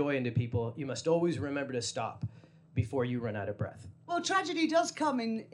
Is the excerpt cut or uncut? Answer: cut